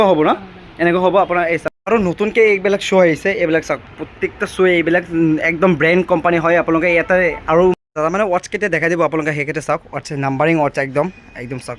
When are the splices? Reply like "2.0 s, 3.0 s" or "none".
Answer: 1.7 s, 7.8 s